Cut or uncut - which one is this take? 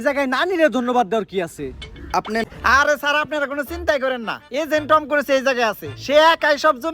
cut